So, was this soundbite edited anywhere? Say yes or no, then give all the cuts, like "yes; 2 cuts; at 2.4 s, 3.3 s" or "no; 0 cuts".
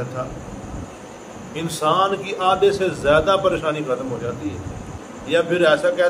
yes; 1 cut; at 5.0 s